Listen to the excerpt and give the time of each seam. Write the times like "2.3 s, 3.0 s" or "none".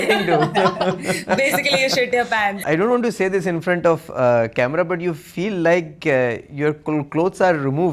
2.5 s

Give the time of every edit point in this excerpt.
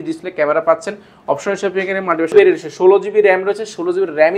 2.3 s

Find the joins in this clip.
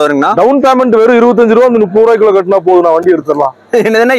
none

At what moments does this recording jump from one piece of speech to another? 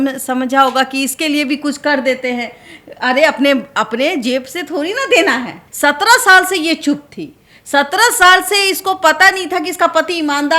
5.6 s

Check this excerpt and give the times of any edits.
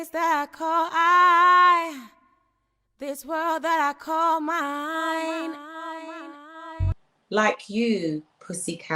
6.9 s

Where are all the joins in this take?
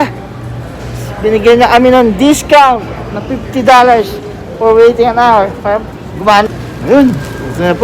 6.5 s

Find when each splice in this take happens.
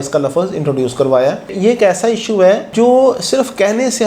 1.5 s

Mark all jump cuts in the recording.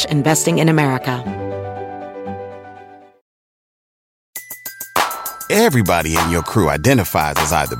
1.2 s

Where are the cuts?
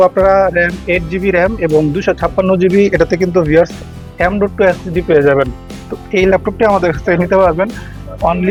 none

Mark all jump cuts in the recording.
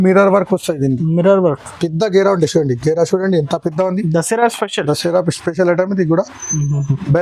none

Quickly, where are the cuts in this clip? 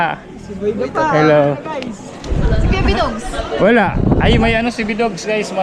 none

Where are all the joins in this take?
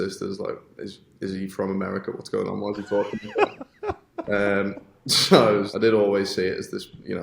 5.7 s

